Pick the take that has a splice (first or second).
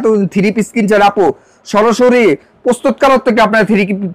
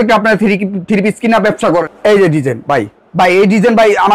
second